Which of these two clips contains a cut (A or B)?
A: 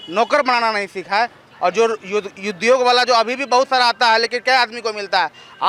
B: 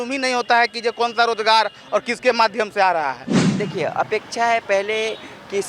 B